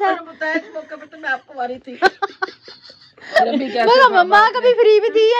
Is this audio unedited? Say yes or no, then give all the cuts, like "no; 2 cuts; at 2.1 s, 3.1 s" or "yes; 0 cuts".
yes; 0 cuts